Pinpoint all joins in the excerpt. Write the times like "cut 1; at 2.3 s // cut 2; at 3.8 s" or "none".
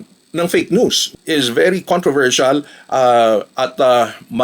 cut 1; at 1.1 s